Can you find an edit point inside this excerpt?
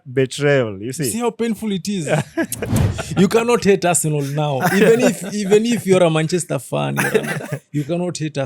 yes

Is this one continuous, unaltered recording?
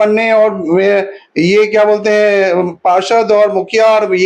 yes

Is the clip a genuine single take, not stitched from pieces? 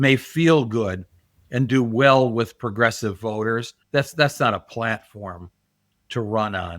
no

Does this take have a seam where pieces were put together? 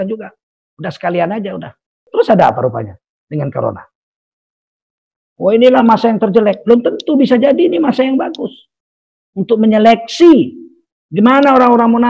yes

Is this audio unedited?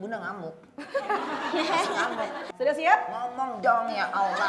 no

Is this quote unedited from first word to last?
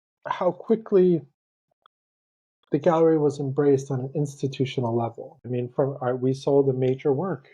no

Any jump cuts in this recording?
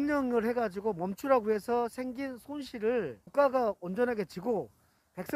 no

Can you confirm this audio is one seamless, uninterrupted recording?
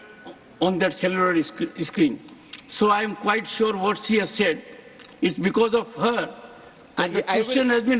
yes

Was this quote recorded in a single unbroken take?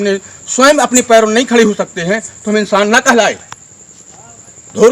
yes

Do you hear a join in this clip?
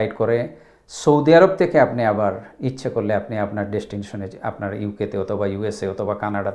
no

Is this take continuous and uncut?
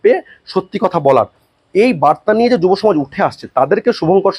yes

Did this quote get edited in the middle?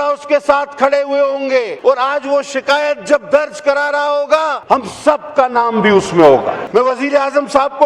yes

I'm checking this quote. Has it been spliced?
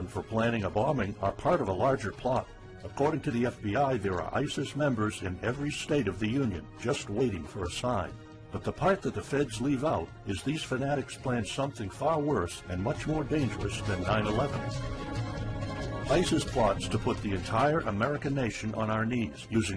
yes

